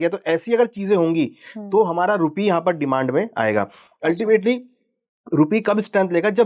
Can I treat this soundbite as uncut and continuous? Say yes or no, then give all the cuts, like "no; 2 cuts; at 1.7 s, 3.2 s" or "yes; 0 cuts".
yes; 0 cuts